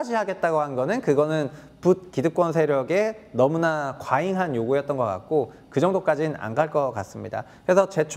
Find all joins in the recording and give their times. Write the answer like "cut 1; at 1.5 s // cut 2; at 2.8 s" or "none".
none